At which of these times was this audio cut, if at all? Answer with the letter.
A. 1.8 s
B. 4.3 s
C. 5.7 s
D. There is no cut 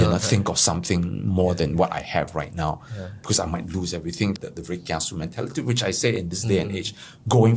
B